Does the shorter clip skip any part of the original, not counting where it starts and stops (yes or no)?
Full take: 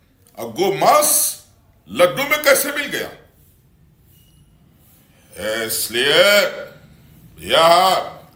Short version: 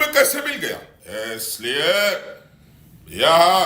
yes